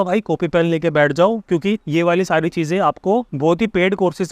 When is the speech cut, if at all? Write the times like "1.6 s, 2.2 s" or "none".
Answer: 1.8 s, 3.3 s